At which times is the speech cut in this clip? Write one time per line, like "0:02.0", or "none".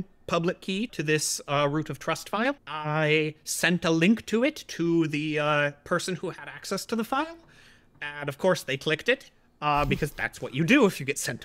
0:00.9
0:02.7